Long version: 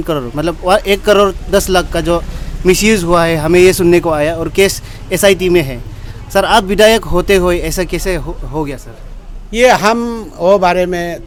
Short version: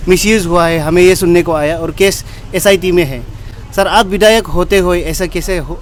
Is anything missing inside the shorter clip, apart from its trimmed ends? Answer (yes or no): no